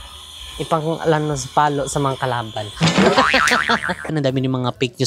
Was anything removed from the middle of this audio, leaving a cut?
yes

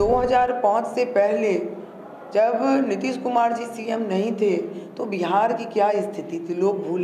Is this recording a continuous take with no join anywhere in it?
yes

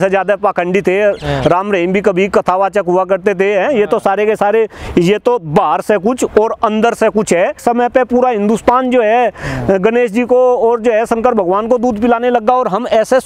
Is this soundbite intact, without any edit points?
no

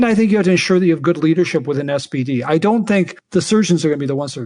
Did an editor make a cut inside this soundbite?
yes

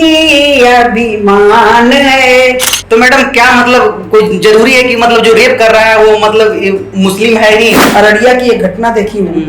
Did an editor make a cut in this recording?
yes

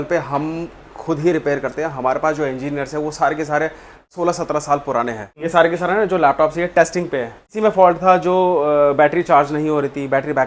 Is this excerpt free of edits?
no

